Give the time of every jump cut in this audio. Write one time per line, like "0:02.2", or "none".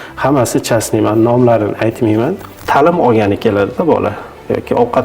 0:02.6